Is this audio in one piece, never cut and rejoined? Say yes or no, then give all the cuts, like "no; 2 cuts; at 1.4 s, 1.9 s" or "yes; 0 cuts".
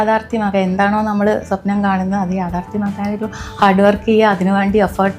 yes; 0 cuts